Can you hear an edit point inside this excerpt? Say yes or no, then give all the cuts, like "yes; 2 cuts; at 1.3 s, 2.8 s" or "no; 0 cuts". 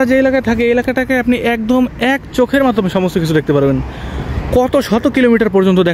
no; 0 cuts